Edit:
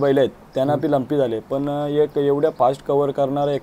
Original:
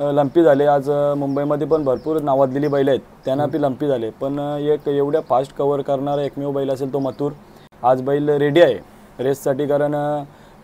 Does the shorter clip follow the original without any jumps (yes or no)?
yes